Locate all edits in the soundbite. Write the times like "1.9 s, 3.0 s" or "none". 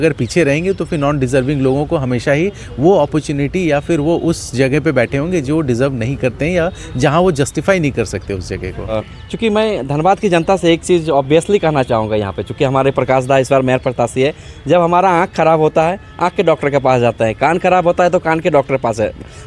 9.0 s